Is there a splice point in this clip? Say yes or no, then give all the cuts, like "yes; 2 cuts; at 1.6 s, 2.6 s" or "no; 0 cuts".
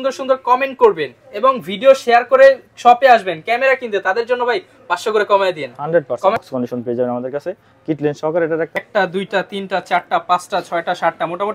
yes; 2 cuts; at 6.4 s, 8.8 s